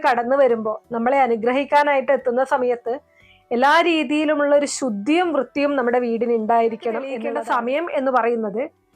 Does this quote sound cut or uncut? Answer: cut